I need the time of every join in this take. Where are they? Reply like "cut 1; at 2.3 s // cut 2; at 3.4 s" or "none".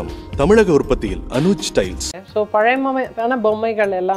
cut 1; at 2.1 s